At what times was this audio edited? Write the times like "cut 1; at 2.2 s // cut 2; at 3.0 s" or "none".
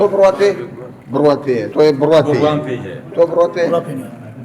cut 1; at 1.7 s // cut 2; at 3.0 s